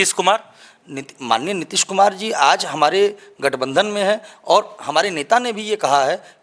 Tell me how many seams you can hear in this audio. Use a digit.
0